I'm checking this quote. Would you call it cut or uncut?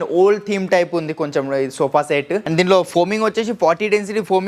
cut